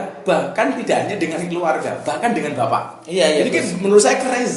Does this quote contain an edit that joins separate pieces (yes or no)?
no